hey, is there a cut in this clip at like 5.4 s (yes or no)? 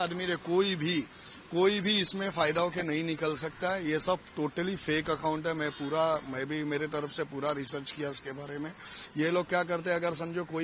no